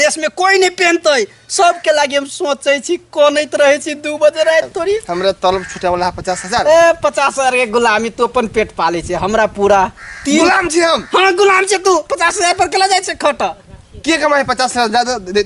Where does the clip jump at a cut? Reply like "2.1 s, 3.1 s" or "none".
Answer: 5.1 s

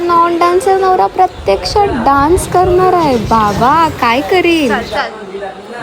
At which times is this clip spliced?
4.8 s

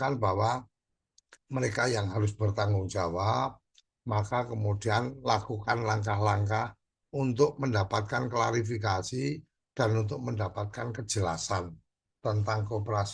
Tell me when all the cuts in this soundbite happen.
none

